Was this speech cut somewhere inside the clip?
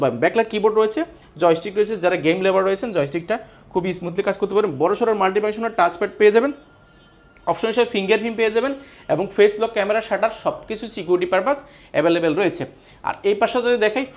no; 0 cuts

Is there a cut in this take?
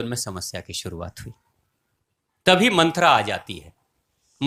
no; 0 cuts

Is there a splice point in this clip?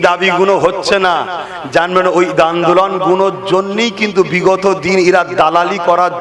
no; 0 cuts

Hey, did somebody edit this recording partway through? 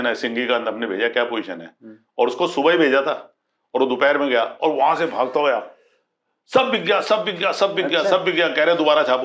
no; 0 cuts

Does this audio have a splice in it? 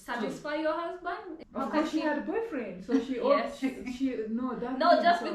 yes; 1 cut; at 1.4 s

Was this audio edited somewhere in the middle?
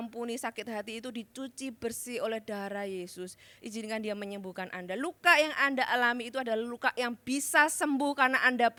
no; 0 cuts

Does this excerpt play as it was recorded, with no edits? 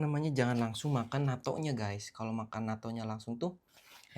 yes; 0 cuts

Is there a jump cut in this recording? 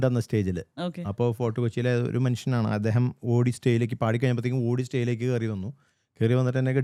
no; 0 cuts

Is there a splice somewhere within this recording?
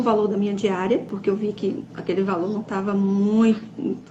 yes; 1 cut; at 1.1 s

